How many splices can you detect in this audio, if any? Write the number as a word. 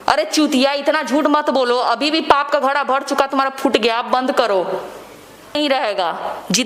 one